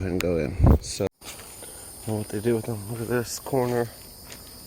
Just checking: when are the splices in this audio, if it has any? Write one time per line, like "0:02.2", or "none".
0:01.1